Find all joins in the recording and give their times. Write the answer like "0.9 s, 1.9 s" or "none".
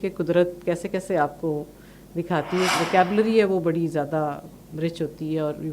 2.7 s